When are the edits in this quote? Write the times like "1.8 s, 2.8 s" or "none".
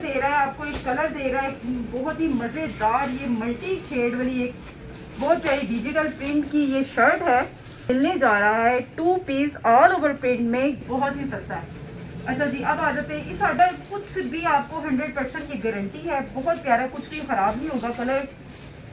7.9 s, 10.8 s, 13.6 s